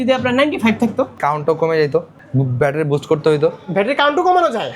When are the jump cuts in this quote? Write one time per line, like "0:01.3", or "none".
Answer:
0:01.1
0:02.2